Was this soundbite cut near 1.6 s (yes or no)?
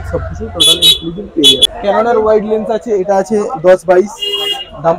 yes